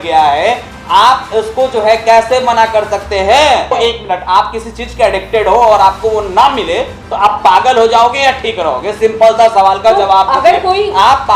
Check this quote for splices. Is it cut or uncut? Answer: cut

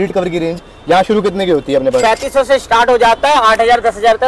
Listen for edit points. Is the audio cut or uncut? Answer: uncut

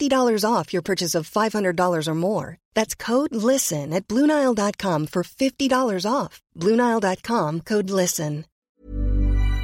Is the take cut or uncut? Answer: cut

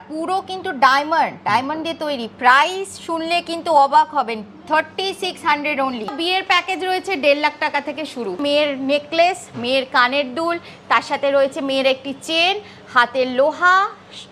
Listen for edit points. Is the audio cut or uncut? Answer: cut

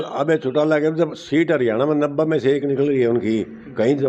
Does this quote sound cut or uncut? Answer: uncut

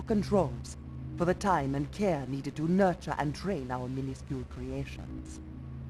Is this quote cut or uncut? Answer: cut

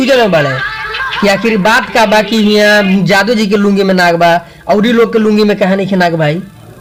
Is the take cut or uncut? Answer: uncut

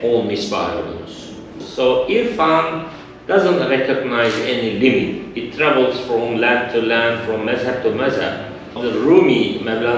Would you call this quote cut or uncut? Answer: cut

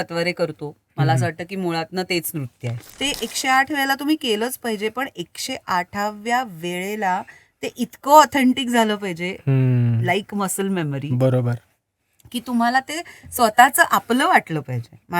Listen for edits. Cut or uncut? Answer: cut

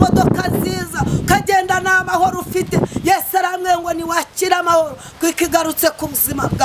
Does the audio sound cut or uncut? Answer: uncut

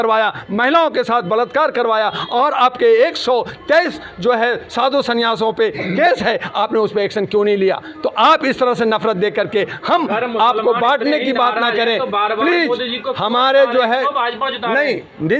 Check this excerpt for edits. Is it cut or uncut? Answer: uncut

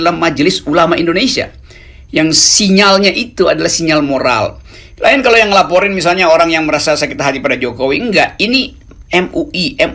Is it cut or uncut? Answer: uncut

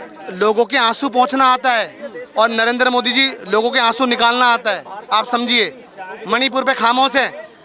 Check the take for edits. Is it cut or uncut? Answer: uncut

